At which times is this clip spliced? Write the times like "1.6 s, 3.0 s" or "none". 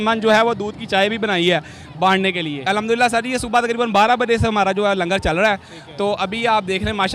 2.6 s